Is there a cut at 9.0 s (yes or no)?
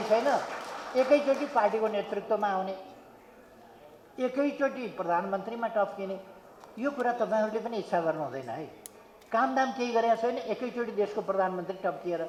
no